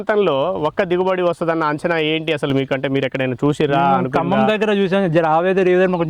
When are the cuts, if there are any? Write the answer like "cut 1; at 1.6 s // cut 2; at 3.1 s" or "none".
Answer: none